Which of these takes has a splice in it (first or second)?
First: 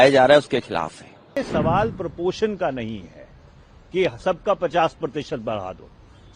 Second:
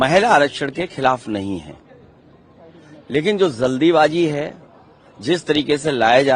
first